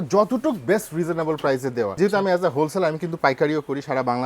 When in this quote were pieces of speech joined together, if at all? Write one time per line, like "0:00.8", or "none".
0:01.9